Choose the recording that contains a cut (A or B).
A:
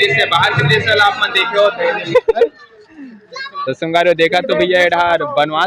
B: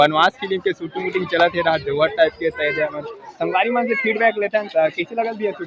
A